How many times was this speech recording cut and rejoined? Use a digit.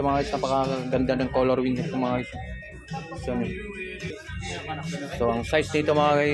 1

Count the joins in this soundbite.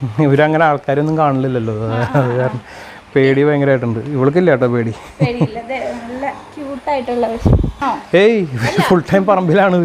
1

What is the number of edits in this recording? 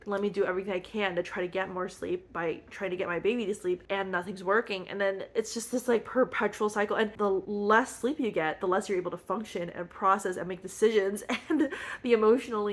0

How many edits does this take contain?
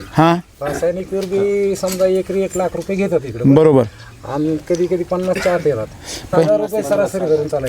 1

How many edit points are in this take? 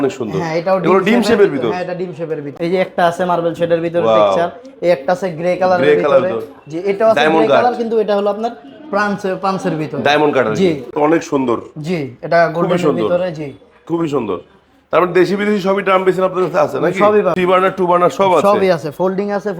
3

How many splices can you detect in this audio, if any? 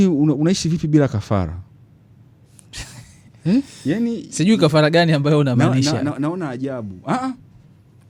0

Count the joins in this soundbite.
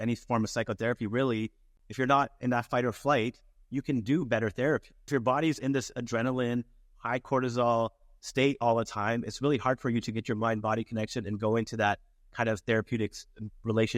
2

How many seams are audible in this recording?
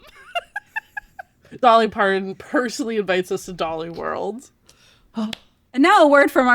1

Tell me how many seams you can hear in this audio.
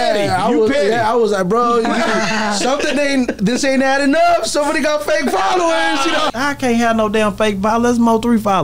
1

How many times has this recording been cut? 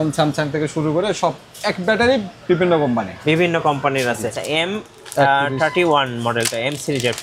1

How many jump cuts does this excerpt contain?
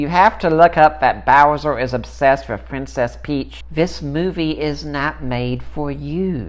1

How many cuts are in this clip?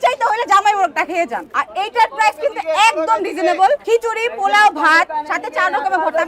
0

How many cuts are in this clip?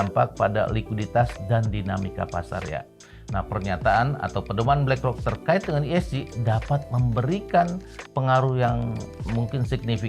1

